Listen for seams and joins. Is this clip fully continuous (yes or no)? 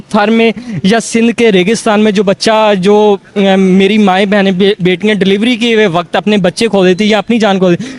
yes